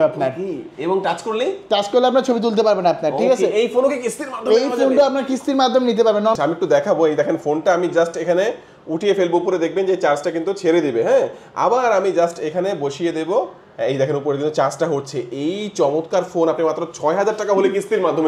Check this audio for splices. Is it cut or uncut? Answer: cut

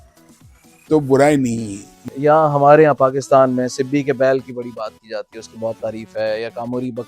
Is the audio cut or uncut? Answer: cut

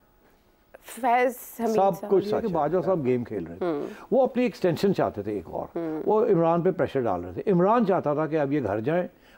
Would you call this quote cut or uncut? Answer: cut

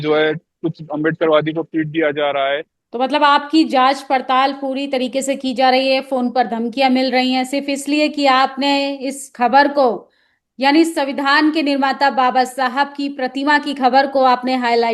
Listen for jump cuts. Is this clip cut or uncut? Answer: cut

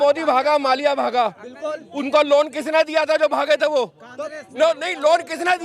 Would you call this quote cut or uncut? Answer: uncut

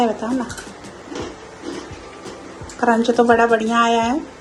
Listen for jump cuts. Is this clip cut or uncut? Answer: uncut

